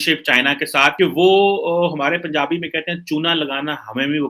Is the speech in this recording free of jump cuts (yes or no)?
yes